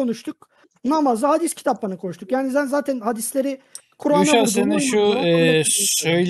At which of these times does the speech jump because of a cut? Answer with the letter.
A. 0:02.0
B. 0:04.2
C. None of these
C